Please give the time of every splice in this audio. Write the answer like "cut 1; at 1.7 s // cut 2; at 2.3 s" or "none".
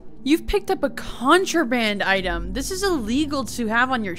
none